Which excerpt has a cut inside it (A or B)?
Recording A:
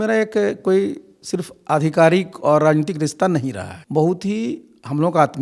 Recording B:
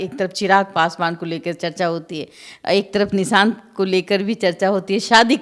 A